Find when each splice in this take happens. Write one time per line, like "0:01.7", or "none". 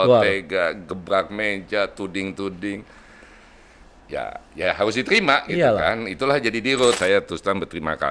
0:07.0